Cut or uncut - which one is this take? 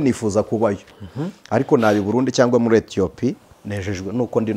uncut